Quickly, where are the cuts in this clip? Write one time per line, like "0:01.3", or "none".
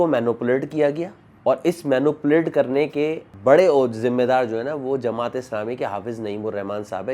none